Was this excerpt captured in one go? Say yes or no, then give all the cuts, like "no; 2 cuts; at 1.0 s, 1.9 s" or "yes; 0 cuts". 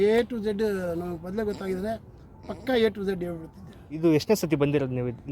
no; 1 cut; at 4.0 s